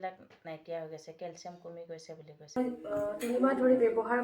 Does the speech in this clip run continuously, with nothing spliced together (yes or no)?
no